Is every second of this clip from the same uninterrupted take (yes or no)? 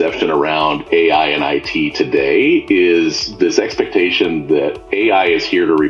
yes